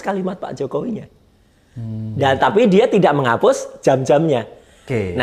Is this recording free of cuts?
yes; 0 cuts

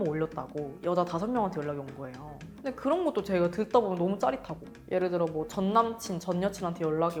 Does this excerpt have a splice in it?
no; 0 cuts

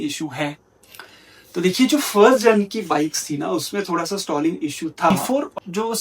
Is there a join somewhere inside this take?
yes; 1 cut; at 5.1 s

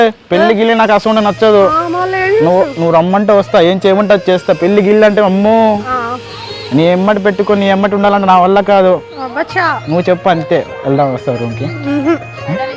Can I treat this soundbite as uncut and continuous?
yes; 0 cuts

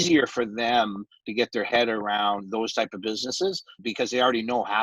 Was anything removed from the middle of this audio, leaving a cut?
yes; 1 cut; at 3.8 s

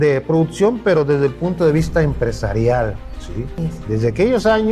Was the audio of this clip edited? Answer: yes; 1 cut; at 3.5 s

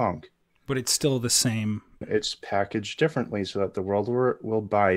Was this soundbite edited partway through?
yes; 1 cut; at 2.0 s

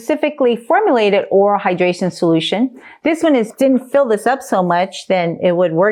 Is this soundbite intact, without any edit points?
no; 1 cut; at 3.5 s

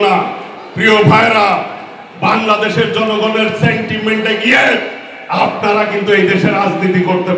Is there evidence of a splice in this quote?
no; 0 cuts

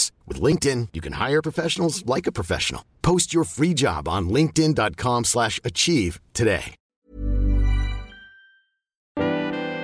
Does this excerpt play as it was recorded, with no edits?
no; 2 cuts; at 6.8 s, 9.1 s

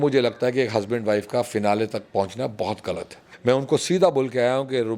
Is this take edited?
yes; 1 cut; at 3.3 s

